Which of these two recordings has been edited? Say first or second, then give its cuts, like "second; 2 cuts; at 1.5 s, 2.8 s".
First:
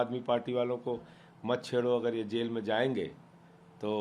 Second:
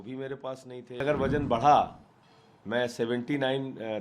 second; 1 cut; at 1.0 s